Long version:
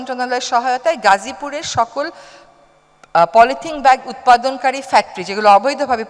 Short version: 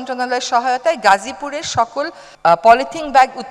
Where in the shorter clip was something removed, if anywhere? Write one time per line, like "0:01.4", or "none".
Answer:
0:02.2

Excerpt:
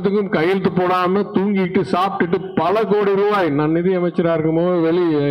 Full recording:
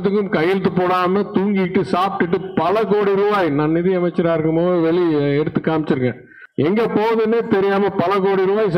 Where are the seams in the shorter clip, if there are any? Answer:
none

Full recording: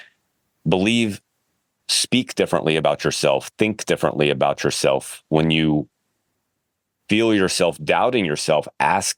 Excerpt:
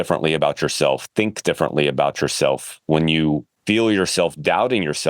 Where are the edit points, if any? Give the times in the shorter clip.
0:03.5

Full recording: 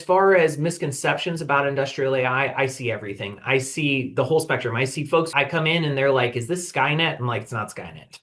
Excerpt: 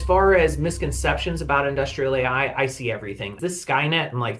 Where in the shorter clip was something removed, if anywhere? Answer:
0:03.3

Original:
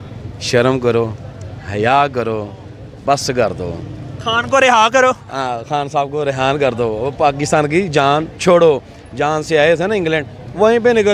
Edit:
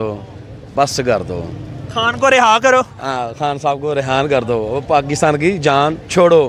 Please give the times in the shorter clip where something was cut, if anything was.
none

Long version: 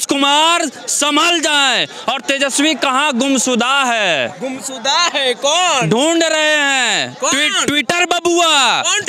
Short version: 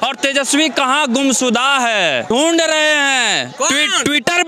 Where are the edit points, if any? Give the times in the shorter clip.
0:02.3

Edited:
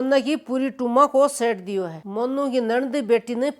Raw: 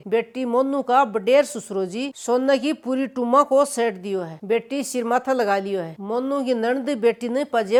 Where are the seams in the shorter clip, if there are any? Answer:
0:02.0

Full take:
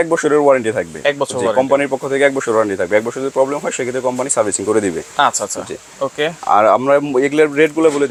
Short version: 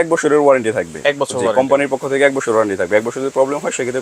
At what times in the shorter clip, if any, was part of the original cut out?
none

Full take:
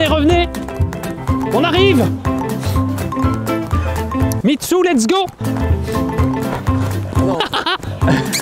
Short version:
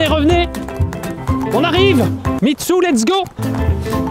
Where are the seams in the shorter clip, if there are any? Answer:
0:02.4

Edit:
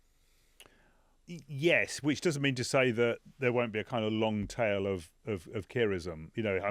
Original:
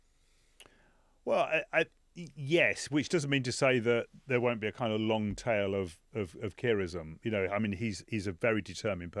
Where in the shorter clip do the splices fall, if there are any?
0:01.1

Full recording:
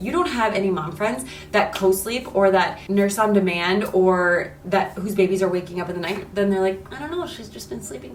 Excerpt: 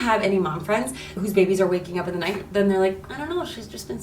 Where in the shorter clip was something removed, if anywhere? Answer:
0:01.1

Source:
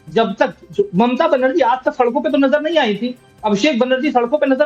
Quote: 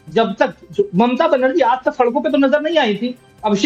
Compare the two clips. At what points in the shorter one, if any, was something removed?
none

